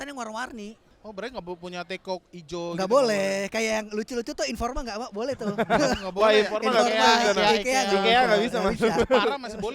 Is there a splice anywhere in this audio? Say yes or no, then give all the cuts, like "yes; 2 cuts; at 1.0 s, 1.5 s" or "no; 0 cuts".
yes; 1 cut; at 1.0 s